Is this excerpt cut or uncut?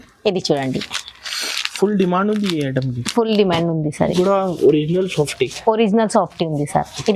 cut